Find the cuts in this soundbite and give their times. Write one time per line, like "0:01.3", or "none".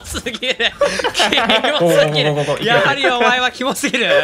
none